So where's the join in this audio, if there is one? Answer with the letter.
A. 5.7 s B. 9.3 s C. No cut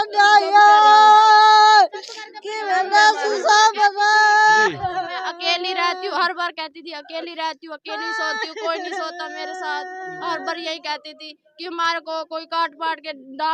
C